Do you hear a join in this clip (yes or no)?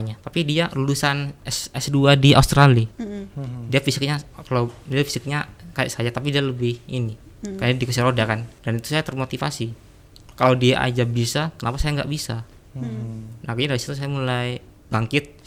no